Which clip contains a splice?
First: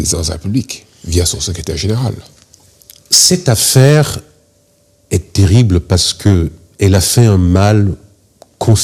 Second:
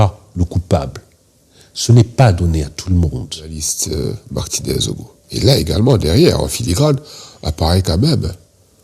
second; 1 cut; at 3.7 s

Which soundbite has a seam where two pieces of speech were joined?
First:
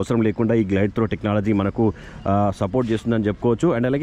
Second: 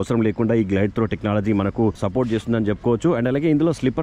second; 1 cut; at 2.0 s

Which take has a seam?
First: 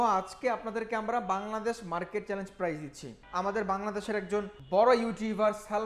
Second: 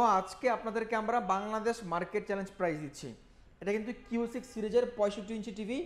first; 2 cuts; at 3.2 s, 4.6 s

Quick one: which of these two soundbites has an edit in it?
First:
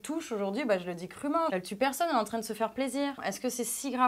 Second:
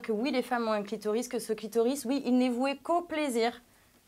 first; 2 cuts; at 1.5 s, 3.2 s

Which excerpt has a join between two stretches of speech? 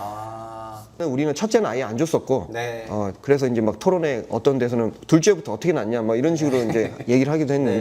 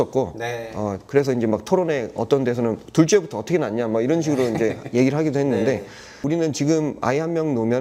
first; 1 cut; at 1.0 s

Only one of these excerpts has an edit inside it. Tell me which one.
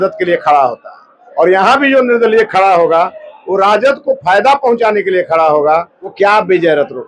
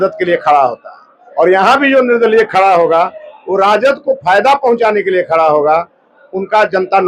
first; 1 cut; at 6.0 s

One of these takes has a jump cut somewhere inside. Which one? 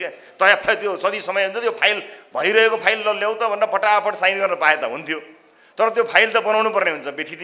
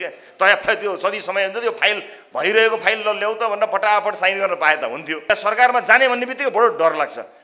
second; 1 cut; at 5.2 s

